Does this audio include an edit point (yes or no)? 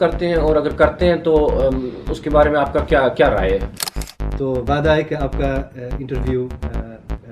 yes